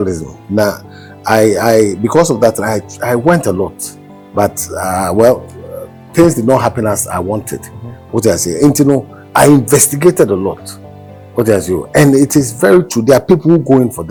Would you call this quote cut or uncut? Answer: uncut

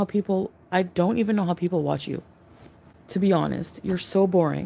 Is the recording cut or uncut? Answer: uncut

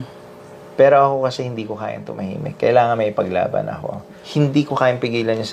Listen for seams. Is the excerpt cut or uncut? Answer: uncut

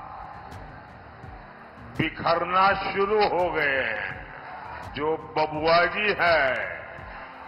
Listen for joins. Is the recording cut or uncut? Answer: cut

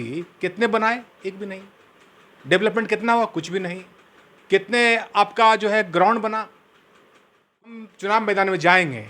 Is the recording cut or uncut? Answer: cut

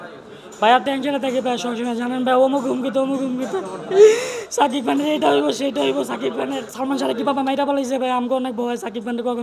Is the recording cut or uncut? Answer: cut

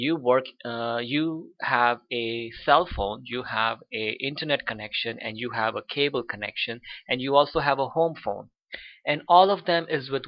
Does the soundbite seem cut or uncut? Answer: cut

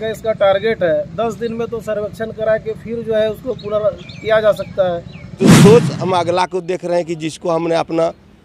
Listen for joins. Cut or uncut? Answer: cut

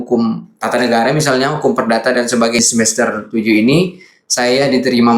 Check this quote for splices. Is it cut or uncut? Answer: cut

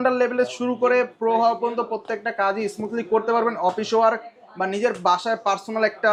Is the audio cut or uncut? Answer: uncut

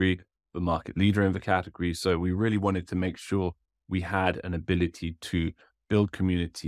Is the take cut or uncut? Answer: uncut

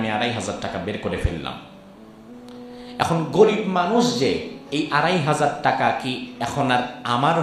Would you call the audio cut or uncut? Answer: uncut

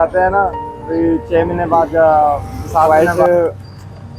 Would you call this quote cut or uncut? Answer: cut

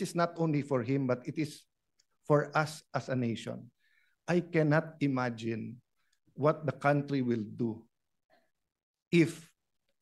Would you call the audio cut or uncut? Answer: uncut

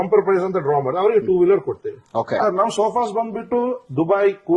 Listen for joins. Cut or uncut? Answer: cut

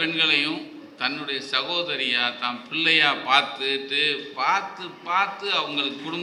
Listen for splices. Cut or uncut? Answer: uncut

